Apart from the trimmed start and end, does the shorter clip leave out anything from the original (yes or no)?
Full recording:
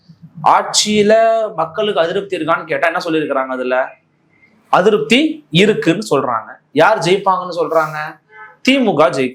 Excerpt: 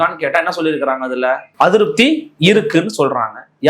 yes